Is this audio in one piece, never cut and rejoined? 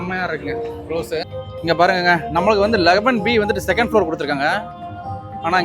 no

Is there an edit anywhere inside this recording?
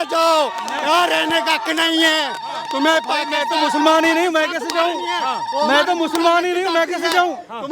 no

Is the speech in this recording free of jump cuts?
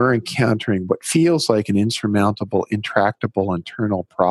no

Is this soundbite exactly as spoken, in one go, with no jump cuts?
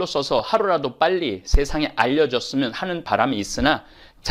yes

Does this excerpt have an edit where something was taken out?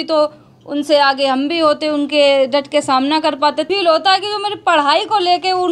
yes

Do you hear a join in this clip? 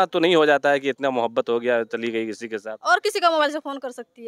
no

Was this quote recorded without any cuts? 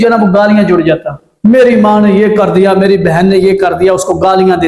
yes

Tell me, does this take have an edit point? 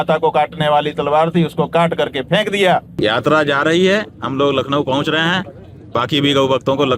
yes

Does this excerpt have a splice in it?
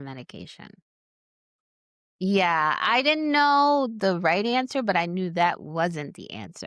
yes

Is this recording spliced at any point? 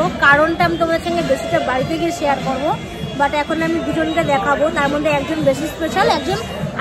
no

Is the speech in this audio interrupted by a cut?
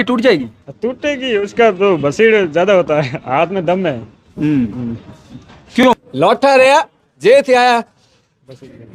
yes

